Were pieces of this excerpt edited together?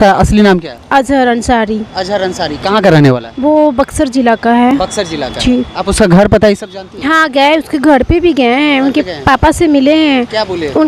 no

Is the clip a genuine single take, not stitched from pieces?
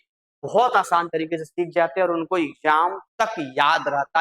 yes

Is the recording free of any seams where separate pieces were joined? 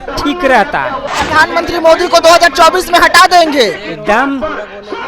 no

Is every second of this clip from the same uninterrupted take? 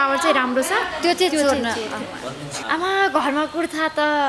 no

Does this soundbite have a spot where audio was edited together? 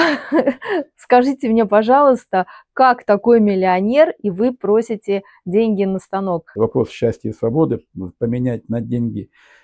yes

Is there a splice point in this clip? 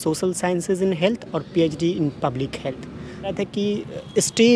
yes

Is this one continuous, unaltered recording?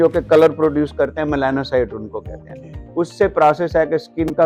yes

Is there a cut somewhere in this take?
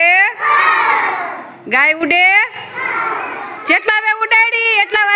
no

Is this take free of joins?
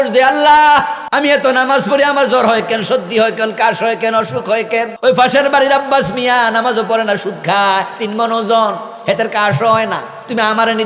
no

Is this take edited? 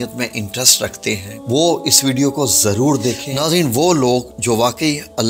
yes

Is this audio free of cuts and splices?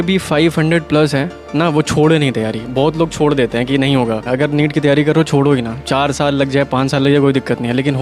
no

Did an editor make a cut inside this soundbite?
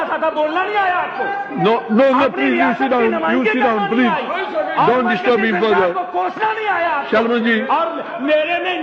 no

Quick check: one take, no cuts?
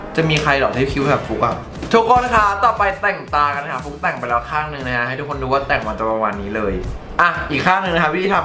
yes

